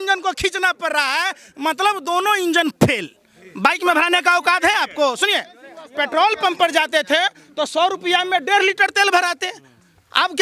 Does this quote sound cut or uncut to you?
uncut